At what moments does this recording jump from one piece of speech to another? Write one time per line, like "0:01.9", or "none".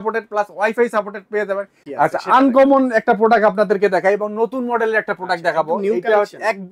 0:01.8